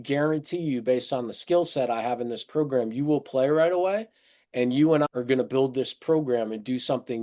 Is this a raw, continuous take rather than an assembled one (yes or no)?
no